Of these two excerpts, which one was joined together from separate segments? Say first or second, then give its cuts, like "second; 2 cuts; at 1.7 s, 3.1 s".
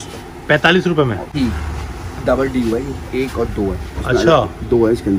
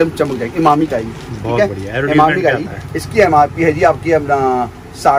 first; 1 cut; at 1.3 s